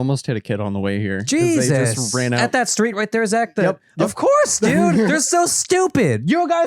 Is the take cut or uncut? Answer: cut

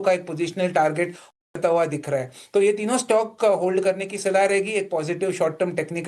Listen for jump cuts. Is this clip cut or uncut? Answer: cut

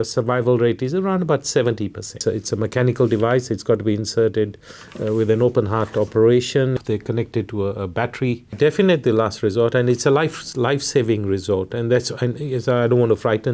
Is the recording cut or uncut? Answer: cut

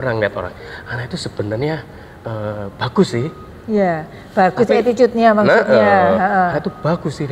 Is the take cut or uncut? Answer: uncut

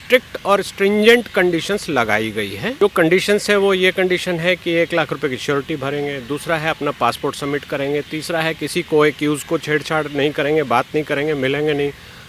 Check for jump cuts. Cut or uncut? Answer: cut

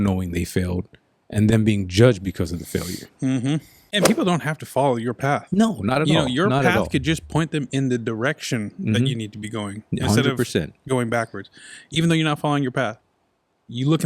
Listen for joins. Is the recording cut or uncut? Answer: cut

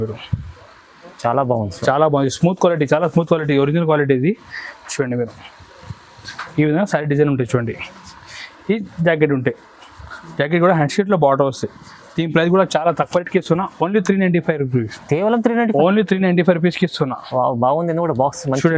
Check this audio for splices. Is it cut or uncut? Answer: uncut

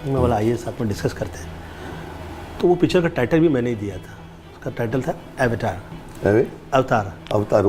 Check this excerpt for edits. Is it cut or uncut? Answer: uncut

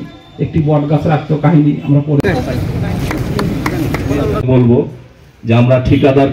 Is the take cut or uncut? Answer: cut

